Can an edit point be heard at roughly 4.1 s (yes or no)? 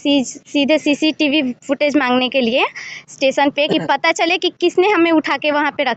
no